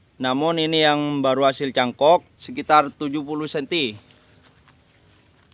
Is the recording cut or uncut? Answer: cut